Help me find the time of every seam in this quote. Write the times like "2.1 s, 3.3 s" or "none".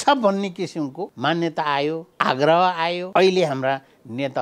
1.1 s, 2.1 s, 3.0 s